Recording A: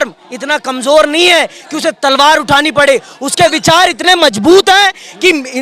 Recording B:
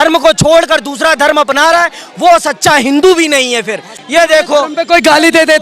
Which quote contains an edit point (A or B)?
B